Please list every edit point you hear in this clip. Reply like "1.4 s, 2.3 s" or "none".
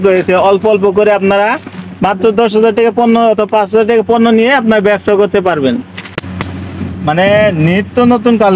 6.0 s